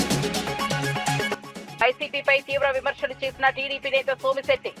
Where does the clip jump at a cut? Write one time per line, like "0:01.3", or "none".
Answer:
none